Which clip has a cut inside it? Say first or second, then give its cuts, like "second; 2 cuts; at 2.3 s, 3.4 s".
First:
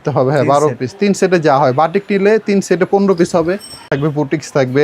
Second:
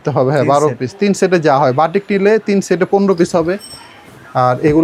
first; 1 cut; at 3.9 s